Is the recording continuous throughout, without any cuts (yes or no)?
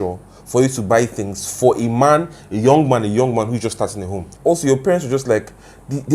no